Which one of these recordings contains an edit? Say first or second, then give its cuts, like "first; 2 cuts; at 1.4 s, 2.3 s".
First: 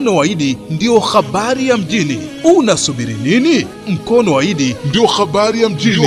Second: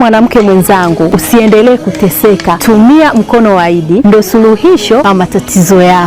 second; 4 cuts; at 1.2 s, 2.5 s, 4.0 s, 5.0 s